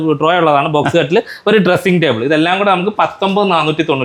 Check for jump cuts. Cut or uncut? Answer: uncut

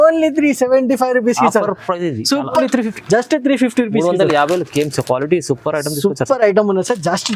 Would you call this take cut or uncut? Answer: cut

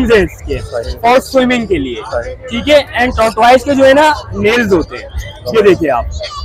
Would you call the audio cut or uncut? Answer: uncut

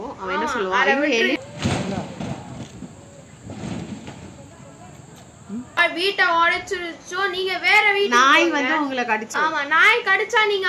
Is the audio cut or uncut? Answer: cut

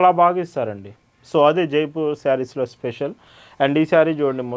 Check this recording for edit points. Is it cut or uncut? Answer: uncut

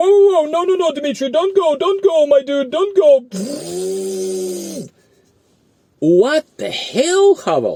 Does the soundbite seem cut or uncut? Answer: uncut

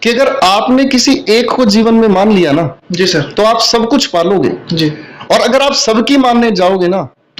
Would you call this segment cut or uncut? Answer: uncut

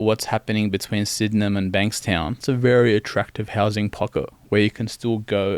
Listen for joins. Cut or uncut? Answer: cut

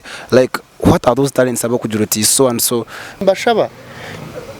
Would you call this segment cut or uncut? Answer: cut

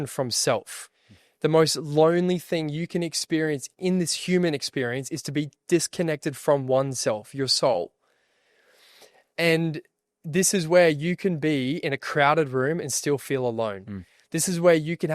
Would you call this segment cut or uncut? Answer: uncut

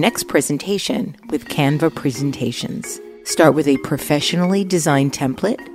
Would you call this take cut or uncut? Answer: uncut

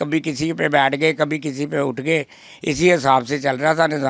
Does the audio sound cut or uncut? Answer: uncut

